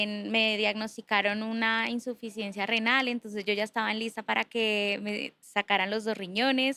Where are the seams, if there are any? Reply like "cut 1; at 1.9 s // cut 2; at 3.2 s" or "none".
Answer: none

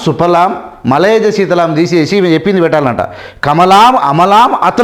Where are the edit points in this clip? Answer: none

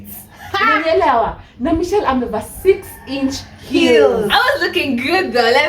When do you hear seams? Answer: cut 1; at 4.4 s

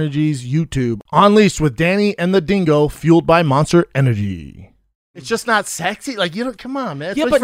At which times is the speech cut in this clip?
cut 1; at 5.1 s

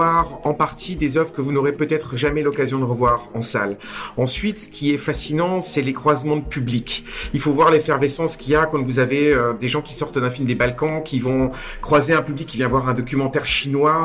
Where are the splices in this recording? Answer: none

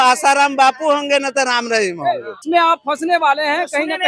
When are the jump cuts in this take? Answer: cut 1; at 2.4 s

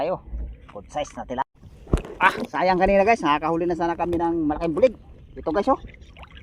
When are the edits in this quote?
cut 1; at 1.4 s

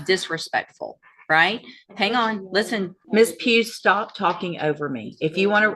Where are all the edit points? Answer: cut 1; at 3.0 s

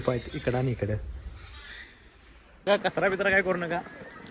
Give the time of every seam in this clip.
cut 1; at 2.7 s

